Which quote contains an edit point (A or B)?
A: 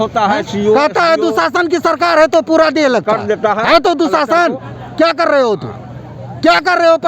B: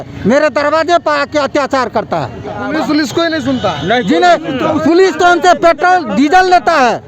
B